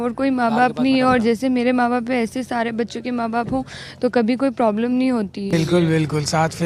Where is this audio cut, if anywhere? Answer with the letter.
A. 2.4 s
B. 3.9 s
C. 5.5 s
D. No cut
C